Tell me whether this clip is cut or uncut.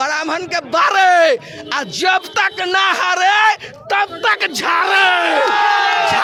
uncut